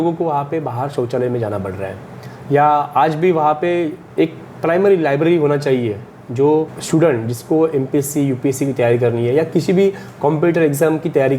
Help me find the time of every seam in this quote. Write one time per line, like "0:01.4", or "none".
0:04.0
0:06.8